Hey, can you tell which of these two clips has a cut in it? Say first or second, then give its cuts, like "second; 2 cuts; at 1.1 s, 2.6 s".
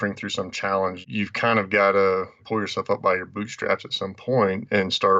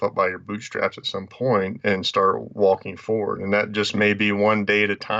first; 1 cut; at 1.0 s